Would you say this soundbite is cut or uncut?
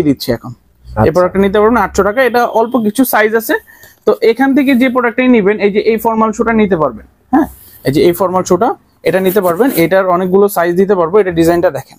uncut